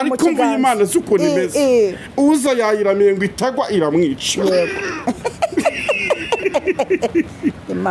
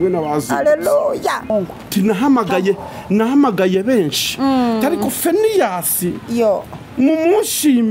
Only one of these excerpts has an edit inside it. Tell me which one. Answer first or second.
second